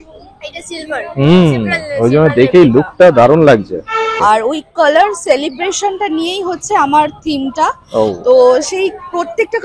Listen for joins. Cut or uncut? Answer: cut